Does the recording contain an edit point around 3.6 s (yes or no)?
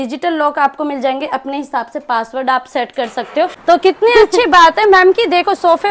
yes